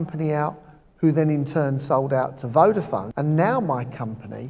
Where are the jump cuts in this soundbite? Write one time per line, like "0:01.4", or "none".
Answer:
0:03.1